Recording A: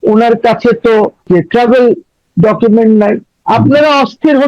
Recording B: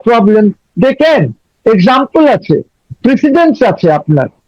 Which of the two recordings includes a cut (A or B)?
A